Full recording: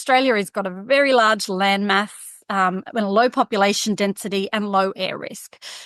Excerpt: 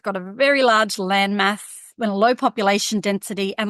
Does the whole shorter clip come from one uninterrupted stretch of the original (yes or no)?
no